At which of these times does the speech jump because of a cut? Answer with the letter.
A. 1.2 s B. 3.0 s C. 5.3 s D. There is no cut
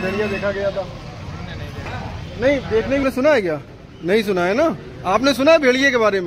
B